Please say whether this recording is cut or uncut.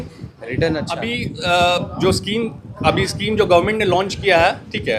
cut